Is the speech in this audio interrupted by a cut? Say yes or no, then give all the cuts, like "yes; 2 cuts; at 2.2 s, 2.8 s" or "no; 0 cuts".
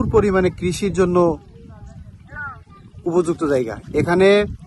no; 0 cuts